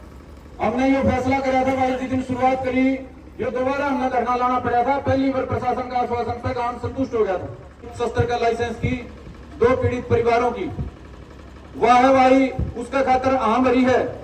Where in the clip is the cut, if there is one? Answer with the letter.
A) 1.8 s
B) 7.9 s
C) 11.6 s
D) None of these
B